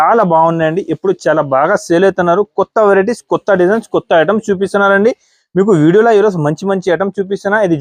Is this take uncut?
yes; 0 cuts

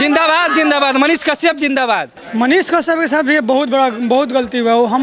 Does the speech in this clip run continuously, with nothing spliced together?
no; 1 cut; at 2.2 s

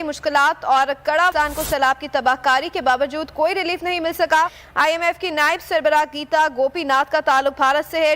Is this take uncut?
no; 1 cut; at 4.6 s

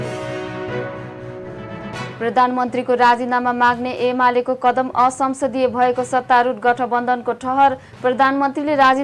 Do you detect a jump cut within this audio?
yes; 1 cut; at 1.1 s

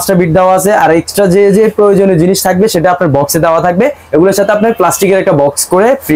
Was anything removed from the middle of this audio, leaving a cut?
no; 0 cuts

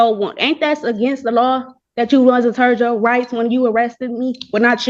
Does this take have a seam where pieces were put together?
no; 0 cuts

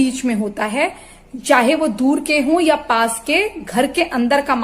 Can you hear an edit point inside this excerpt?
no; 0 cuts

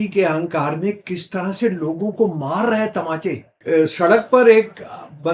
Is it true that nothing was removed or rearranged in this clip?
no; 1 cut; at 3.5 s

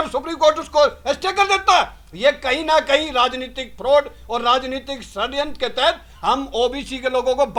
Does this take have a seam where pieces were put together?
no; 0 cuts

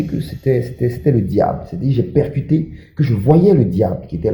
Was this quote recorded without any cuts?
yes; 0 cuts

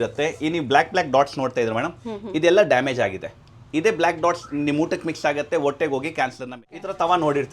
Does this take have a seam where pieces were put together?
yes; 1 cut; at 6.5 s

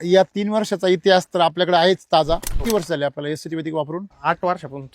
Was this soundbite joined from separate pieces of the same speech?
yes; 2 cuts; at 2.5 s, 4.1 s

